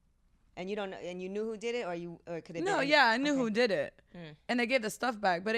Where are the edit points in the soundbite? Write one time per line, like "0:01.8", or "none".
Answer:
none